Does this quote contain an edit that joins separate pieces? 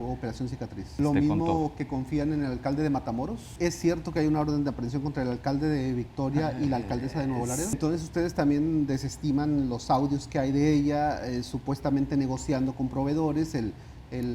yes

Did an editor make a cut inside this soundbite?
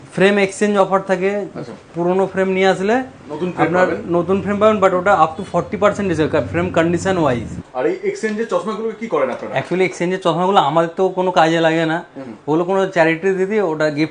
no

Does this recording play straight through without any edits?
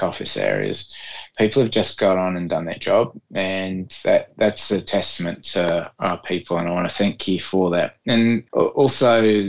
no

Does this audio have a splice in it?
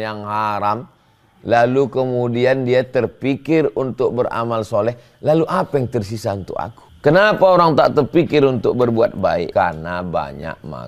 yes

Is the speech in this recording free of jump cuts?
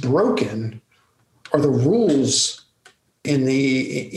no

